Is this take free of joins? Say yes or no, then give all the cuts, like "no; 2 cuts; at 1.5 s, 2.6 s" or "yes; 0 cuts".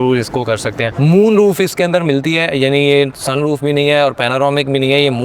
no; 1 cut; at 0.9 s